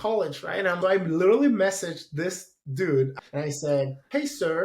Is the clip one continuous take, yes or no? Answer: no